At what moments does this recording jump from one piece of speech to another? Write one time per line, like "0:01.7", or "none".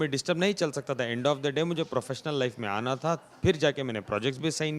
none